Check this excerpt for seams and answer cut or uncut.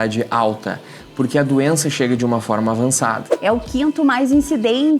cut